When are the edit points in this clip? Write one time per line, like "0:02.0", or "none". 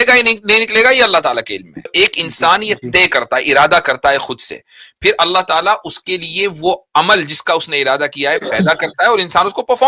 0:01.9